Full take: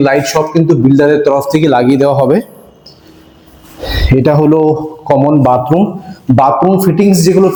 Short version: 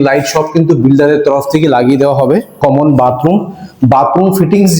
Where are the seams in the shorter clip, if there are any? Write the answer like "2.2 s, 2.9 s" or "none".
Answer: 2.5 s